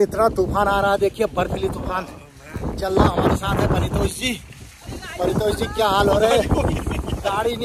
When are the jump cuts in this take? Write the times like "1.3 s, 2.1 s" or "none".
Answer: none